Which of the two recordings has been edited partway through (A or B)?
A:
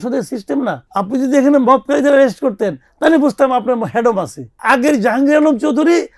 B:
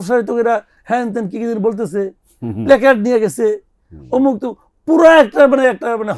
A